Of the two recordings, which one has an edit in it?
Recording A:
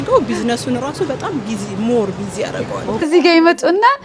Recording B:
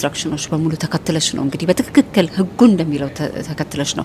A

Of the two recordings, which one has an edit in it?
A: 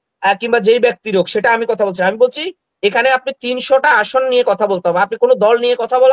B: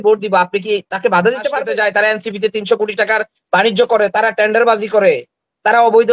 B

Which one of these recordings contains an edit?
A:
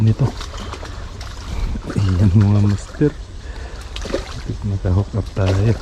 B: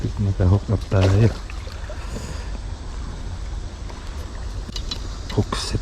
B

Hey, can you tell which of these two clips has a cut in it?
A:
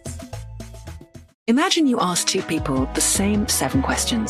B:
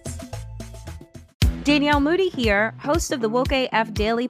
B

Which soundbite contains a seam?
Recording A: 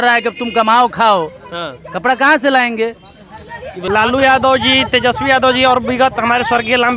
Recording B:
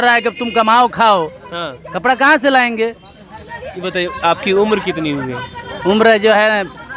A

